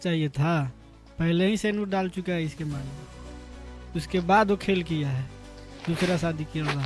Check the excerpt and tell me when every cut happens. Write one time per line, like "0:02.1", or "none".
none